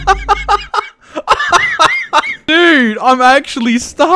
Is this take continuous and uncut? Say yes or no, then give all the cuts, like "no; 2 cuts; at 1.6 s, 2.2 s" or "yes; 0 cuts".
no; 1 cut; at 2.3 s